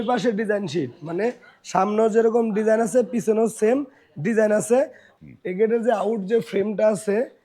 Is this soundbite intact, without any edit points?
no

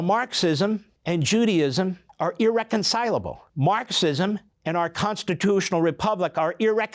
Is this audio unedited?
no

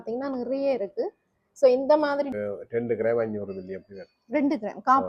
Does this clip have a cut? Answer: yes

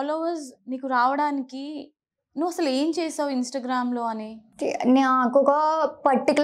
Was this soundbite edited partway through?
yes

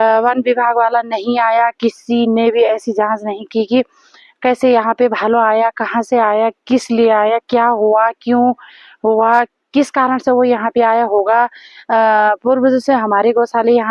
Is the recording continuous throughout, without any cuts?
yes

